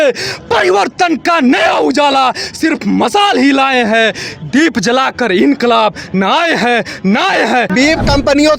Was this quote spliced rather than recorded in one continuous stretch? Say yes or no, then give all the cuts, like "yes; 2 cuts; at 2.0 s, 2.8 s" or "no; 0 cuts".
yes; 1 cut; at 7.7 s